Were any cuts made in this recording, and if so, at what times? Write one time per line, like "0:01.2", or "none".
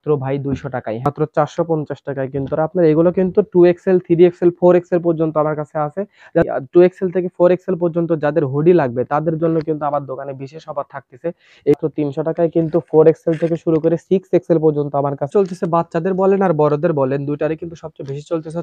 0:01.1
0:06.4
0:11.7
0:15.2